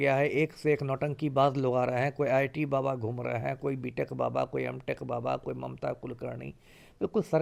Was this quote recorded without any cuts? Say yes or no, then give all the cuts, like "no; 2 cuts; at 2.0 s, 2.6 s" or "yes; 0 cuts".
yes; 0 cuts